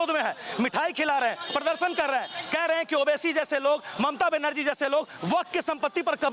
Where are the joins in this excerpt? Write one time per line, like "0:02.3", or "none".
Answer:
none

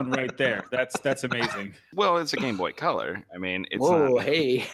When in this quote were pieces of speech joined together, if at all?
0:01.8

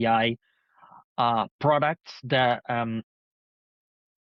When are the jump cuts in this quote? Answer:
none

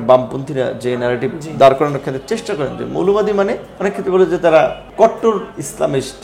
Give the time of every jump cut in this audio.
0:03.7
0:04.8

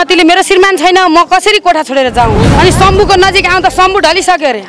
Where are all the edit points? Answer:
0:02.4

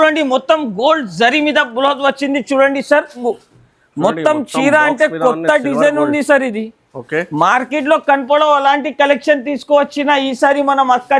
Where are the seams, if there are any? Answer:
0:03.2

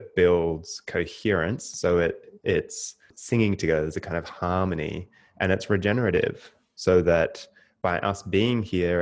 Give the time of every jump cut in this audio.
0:03.1

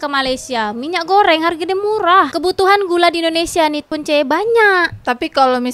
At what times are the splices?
0:02.3

